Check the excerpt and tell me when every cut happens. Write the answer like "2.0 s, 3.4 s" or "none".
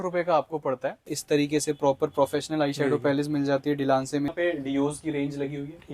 1.1 s, 4.3 s

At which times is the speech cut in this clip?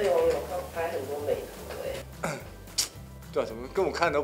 none

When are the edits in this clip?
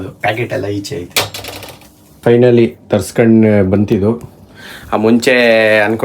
2.2 s

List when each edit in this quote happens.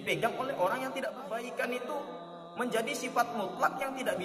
1.2 s

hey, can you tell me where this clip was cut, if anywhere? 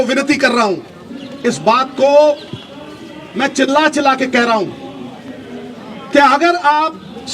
none

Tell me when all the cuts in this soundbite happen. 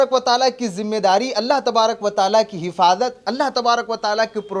none

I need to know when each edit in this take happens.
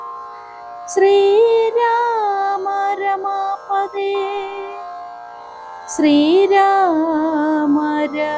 4.7 s, 6.0 s

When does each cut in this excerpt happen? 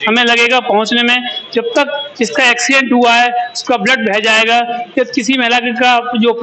none

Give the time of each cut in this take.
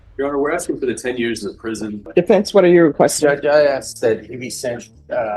2.0 s

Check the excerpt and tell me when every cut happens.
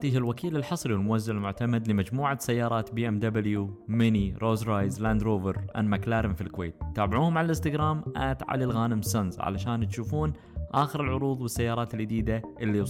none

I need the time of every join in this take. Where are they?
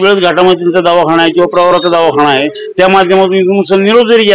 none

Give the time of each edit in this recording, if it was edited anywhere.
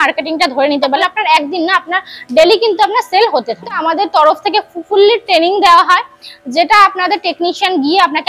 1.0 s, 3.8 s

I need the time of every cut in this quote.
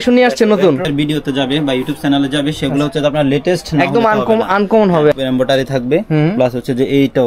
0.9 s, 5.1 s

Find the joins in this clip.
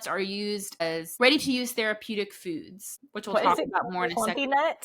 1.1 s

